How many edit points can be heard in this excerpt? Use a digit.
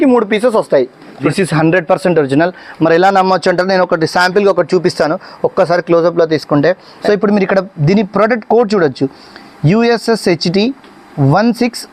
2